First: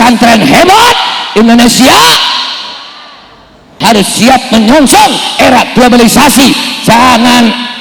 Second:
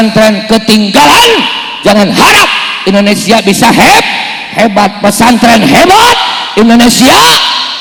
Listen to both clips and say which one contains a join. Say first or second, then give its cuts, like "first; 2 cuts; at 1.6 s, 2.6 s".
first; 1 cut; at 3.7 s